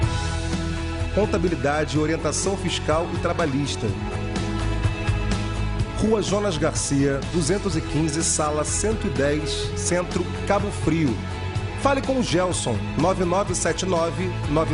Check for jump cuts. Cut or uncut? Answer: uncut